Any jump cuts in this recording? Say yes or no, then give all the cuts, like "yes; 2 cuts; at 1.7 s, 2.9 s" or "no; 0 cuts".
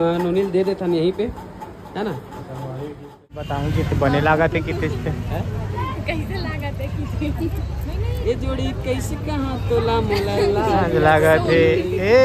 yes; 1 cut; at 3.5 s